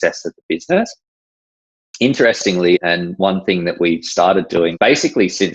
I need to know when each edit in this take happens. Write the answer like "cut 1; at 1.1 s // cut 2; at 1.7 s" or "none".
cut 1; at 2.8 s // cut 2; at 4.7 s